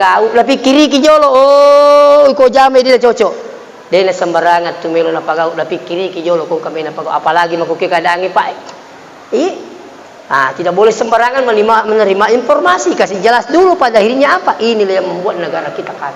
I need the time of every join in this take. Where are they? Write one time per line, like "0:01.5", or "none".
none